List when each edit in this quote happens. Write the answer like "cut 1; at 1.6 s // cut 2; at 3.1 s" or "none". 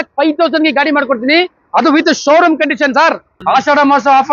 cut 1; at 3.3 s